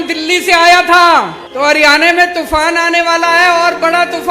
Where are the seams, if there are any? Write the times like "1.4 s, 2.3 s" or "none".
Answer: 1.4 s